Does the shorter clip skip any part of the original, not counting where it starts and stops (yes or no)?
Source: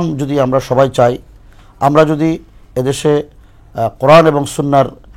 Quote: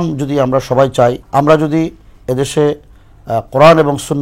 yes